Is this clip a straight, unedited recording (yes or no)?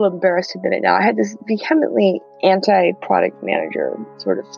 no